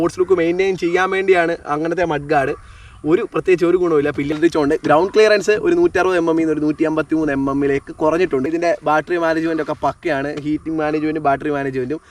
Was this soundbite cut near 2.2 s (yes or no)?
no